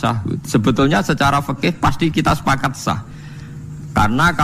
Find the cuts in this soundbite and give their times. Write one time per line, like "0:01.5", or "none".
none